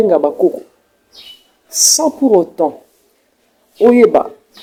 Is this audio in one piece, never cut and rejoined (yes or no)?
yes